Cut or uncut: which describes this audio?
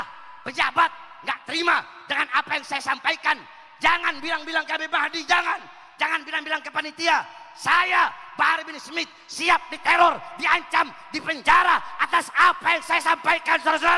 uncut